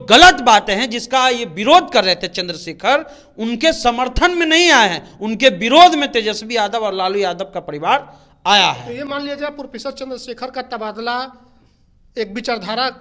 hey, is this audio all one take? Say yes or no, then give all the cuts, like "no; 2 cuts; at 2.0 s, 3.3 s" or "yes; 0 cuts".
yes; 0 cuts